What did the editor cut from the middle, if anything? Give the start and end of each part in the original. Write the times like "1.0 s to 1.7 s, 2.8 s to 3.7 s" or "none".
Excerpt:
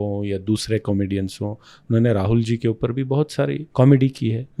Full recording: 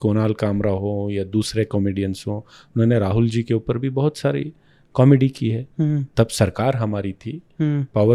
4.5 s to 4.8 s